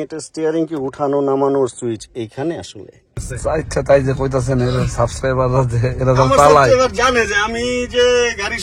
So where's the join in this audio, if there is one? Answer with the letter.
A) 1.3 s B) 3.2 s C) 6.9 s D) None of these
B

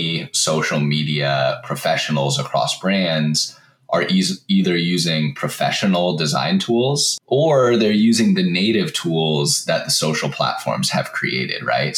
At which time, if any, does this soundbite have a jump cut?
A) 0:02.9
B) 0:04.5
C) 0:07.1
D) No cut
C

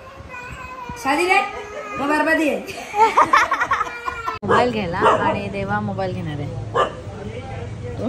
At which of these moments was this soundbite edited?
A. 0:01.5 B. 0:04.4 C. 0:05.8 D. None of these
B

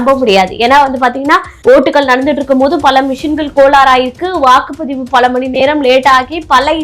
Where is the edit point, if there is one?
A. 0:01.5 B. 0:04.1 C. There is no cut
A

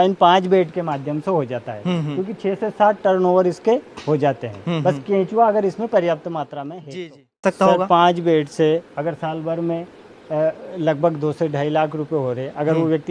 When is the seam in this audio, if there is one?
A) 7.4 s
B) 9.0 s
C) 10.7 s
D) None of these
A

